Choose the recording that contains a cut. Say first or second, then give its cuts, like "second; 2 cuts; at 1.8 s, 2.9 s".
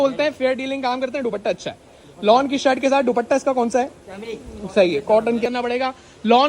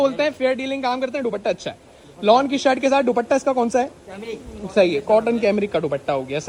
first; 1 cut; at 5.5 s